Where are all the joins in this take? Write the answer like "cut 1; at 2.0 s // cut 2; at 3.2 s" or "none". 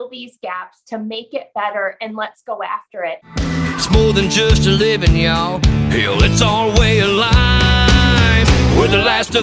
cut 1; at 3.3 s